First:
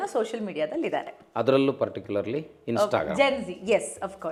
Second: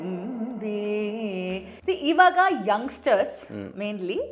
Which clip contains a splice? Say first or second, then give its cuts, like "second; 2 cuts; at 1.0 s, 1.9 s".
second; 1 cut; at 1.7 s